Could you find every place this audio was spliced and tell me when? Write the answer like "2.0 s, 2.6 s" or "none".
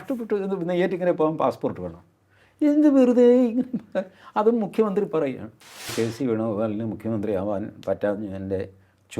5.9 s